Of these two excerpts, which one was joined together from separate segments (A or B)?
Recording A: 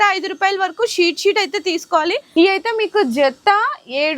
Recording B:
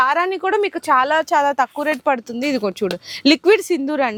A